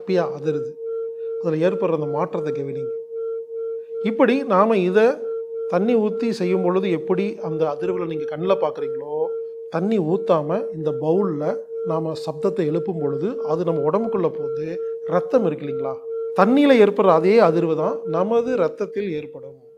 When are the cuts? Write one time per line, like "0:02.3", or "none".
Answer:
none